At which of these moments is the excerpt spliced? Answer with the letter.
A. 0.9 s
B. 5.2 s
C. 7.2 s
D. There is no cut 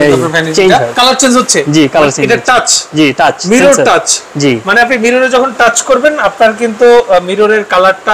A